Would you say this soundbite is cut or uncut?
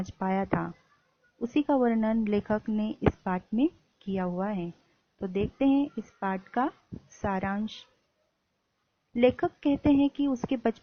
uncut